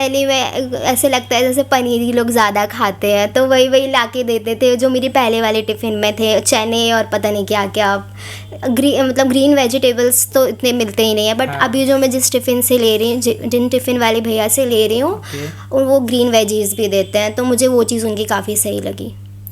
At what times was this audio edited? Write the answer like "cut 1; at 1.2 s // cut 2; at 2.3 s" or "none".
none